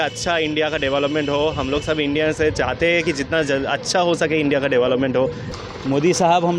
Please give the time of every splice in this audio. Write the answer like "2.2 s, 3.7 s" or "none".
5.5 s